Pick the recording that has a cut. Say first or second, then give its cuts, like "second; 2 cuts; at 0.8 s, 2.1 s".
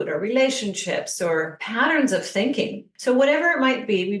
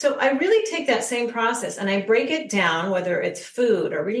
first; 2 cuts; at 1.6 s, 2.9 s